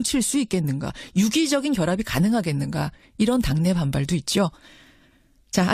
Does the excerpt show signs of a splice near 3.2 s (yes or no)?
yes